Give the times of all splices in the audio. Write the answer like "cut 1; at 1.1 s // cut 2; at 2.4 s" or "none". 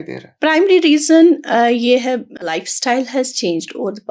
cut 1; at 2.4 s